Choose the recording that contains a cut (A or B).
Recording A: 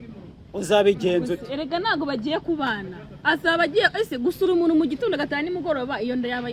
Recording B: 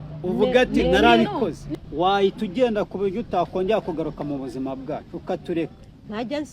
B